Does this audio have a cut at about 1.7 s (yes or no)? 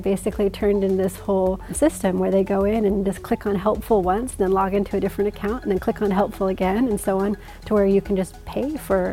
yes